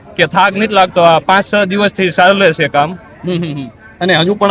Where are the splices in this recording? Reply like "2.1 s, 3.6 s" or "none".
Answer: none

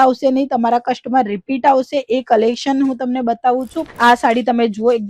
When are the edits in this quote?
3.8 s

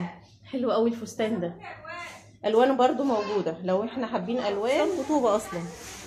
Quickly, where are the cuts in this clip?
5.0 s

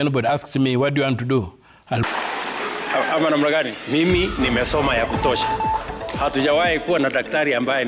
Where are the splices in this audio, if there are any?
2.1 s

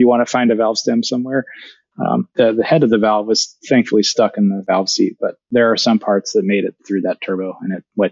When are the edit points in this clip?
5.4 s, 6.8 s

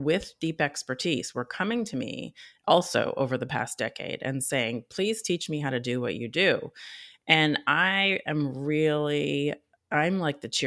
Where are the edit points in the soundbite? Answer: 9.7 s

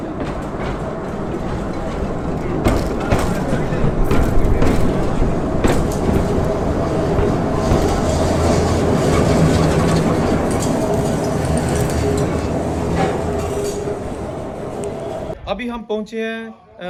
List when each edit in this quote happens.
none

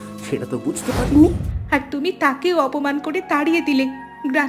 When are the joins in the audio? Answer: 1.5 s

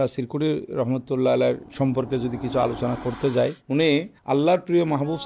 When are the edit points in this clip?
1.7 s, 4.0 s

